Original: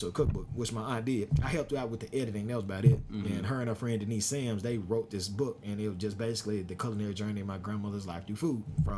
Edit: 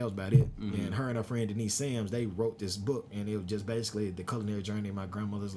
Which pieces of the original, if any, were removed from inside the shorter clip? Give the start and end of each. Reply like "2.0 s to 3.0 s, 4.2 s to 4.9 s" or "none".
none

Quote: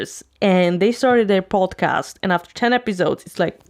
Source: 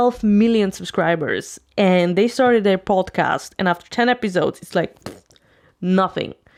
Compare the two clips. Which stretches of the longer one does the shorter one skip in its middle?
none

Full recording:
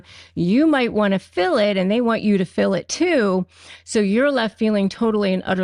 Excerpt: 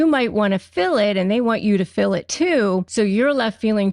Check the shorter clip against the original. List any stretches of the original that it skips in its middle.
3.5 s to 3.9 s

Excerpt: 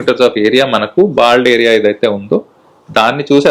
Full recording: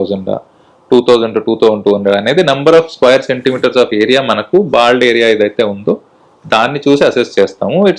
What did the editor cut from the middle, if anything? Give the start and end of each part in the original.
none

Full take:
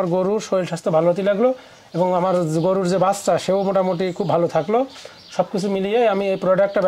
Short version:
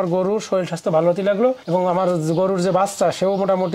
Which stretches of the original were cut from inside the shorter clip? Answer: 1.6 s to 1.9 s

